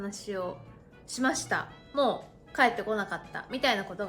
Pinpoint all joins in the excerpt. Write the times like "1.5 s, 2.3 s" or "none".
1.8 s